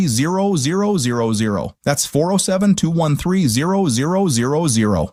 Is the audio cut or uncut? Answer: uncut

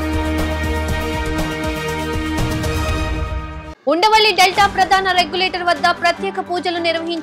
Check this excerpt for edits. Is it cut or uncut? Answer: cut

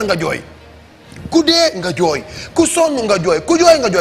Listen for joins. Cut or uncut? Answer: uncut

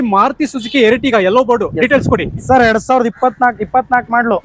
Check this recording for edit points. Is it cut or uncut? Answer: uncut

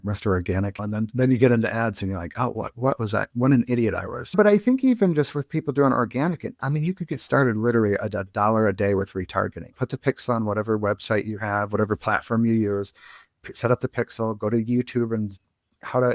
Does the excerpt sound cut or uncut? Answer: cut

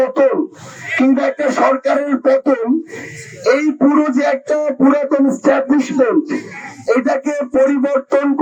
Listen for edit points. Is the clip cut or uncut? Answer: uncut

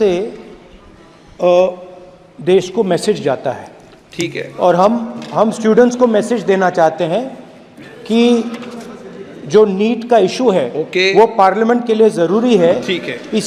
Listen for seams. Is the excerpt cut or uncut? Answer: uncut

